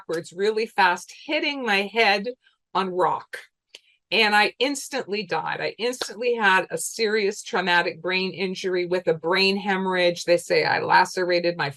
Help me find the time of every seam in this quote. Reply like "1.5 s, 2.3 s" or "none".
none